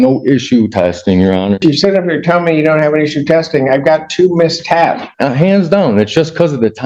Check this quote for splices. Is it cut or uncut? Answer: cut